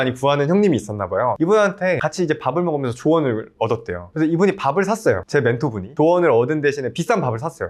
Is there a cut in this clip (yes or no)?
no